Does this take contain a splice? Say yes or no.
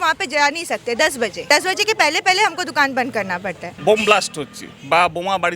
yes